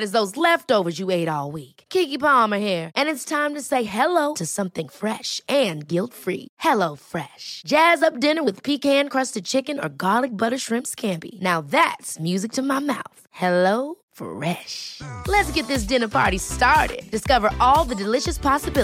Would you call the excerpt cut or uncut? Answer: uncut